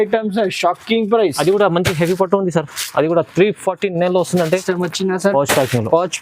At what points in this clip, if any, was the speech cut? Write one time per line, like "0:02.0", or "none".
0:04.6